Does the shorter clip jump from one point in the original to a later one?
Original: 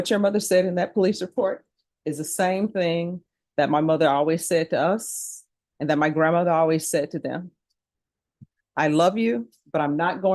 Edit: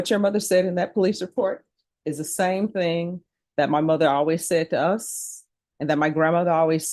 no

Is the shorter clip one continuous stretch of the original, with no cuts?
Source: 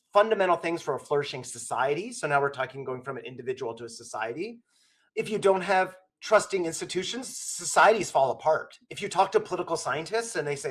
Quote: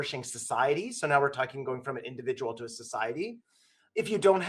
yes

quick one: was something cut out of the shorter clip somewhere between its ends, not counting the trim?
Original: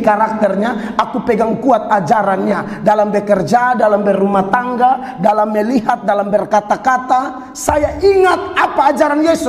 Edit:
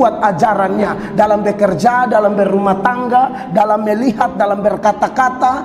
no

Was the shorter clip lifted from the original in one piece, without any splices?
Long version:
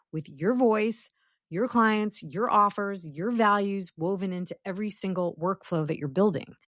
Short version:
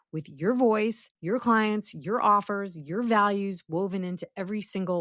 no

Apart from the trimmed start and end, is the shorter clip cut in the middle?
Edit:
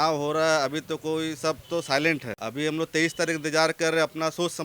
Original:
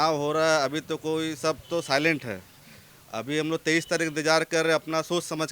yes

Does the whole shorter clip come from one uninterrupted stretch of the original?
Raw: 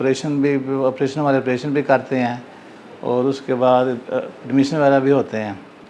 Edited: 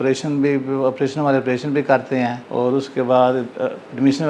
no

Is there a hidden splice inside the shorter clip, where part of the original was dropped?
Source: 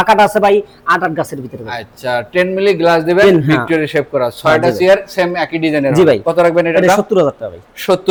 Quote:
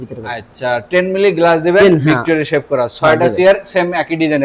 no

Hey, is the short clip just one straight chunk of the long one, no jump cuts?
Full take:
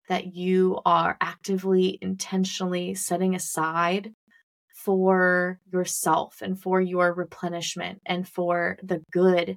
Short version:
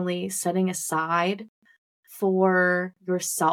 yes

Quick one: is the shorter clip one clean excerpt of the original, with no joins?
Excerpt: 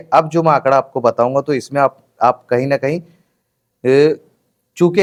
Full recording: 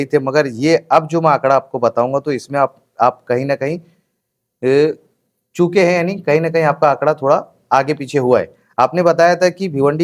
yes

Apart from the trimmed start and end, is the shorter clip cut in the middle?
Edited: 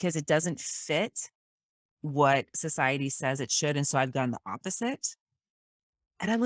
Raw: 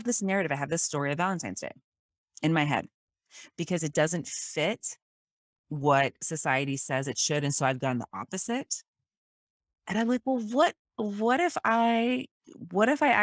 no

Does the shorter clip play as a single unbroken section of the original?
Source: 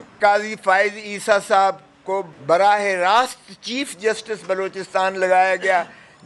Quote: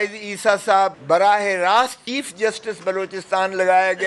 no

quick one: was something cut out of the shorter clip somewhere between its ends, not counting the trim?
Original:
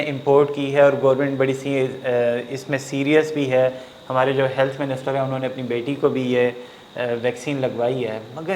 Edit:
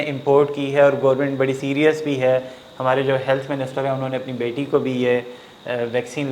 yes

